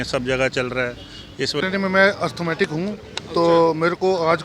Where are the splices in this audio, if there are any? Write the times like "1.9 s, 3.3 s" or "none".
1.6 s

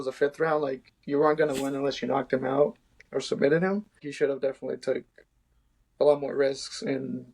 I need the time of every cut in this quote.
4.1 s

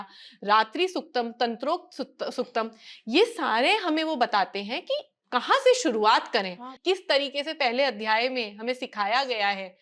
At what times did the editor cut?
6.7 s

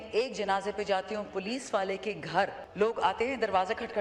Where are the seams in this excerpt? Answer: 2.6 s

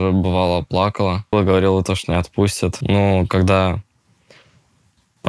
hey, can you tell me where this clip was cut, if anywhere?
1.3 s, 2.8 s

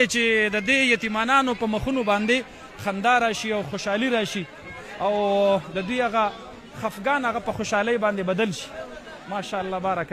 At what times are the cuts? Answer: none

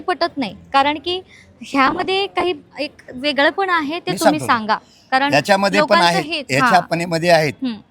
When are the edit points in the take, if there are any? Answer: none

